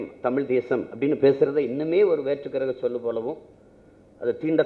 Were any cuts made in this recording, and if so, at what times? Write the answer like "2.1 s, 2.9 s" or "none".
none